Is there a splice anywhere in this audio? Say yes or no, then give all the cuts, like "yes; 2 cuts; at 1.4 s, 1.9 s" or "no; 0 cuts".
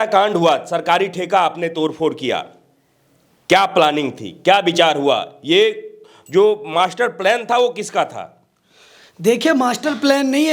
no; 0 cuts